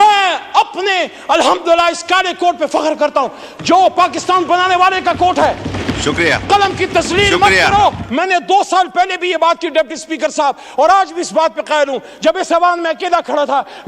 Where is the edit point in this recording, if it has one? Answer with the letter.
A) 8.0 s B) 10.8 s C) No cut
A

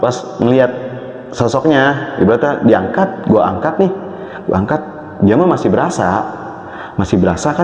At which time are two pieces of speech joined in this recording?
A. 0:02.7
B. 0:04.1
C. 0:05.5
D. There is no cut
D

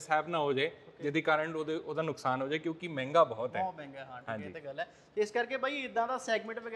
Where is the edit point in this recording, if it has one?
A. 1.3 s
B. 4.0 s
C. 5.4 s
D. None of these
D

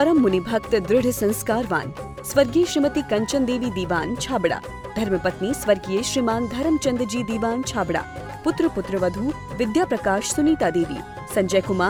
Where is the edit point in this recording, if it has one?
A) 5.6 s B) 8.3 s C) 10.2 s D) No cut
D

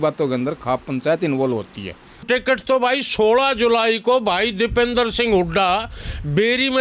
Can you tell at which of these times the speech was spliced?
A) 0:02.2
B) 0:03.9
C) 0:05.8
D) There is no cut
A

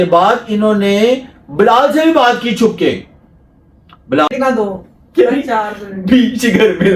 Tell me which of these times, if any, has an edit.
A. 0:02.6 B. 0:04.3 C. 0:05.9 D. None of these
B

